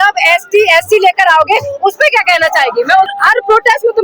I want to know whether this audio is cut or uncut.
cut